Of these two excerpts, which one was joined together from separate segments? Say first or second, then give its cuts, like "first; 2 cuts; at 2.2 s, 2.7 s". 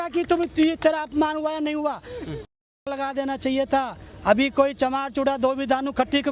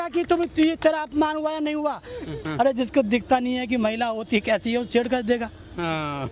second; 1 cut; at 2.4 s